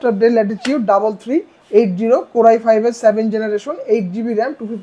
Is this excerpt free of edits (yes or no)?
yes